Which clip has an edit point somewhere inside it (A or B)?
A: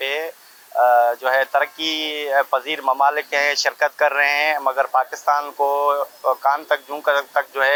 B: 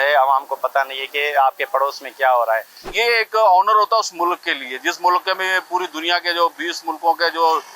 B